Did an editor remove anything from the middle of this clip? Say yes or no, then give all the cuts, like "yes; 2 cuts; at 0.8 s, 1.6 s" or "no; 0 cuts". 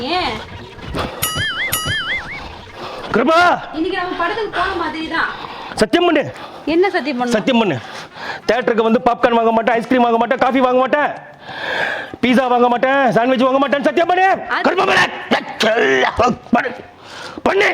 no; 0 cuts